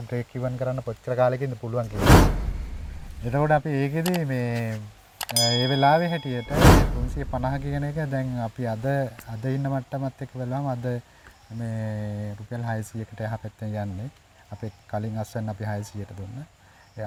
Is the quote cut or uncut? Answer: uncut